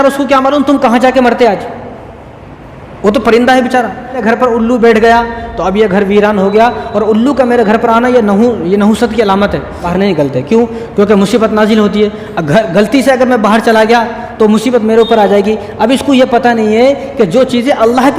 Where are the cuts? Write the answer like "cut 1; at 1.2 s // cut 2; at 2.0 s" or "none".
cut 1; at 4.2 s // cut 2; at 9.9 s

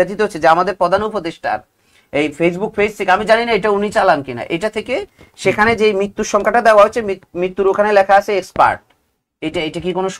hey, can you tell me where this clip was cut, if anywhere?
none

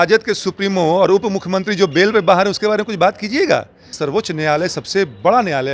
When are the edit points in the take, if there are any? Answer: cut 1; at 3.9 s

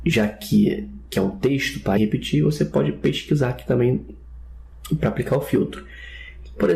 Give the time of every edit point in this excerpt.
none

